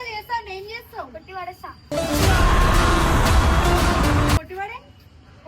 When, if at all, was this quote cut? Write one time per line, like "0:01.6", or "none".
0:01.8
0:04.4